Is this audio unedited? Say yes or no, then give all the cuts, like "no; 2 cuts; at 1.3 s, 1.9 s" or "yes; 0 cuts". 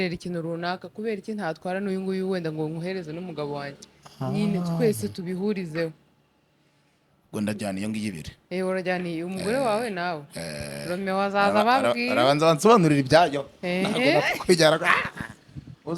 yes; 0 cuts